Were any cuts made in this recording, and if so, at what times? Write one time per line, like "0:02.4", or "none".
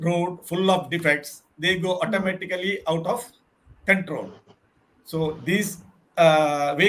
none